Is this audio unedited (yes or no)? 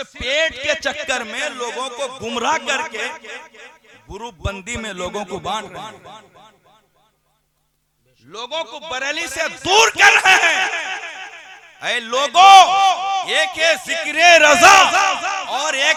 yes